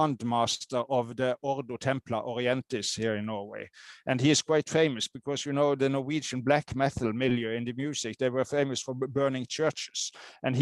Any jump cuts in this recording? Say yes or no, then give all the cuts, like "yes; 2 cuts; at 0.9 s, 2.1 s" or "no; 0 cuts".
no; 0 cuts